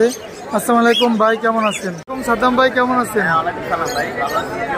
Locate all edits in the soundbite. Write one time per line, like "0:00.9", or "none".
0:02.1